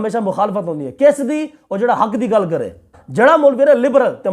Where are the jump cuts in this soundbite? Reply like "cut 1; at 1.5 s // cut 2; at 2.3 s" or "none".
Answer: cut 1; at 3.0 s